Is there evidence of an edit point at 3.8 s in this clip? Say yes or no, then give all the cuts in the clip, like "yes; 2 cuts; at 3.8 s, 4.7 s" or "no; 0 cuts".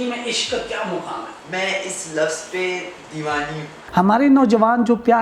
yes; 2 cuts; at 1.4 s, 3.8 s